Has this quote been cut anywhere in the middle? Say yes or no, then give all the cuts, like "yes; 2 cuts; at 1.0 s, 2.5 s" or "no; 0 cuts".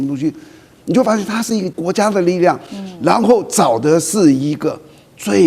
yes; 1 cut; at 1.7 s